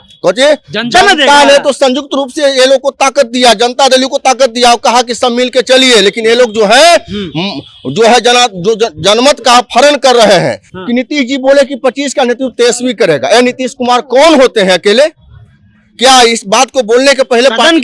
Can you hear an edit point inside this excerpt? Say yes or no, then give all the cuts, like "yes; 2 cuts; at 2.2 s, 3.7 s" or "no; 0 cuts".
yes; 1 cut; at 10.7 s